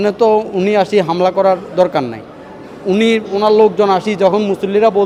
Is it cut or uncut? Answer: uncut